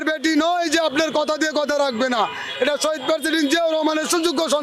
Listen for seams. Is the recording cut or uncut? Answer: uncut